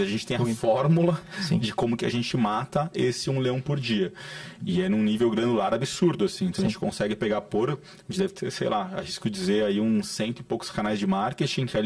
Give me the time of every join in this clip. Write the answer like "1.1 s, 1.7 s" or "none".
none